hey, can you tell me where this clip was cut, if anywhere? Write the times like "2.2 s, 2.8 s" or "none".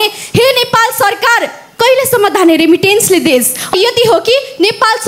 3.7 s